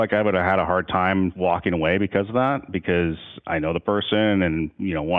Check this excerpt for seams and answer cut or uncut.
cut